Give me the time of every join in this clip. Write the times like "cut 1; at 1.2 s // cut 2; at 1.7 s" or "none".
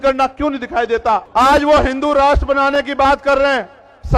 cut 1; at 1.3 s